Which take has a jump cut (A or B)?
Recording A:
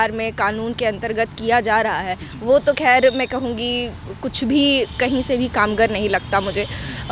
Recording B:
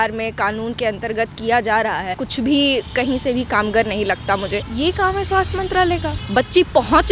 B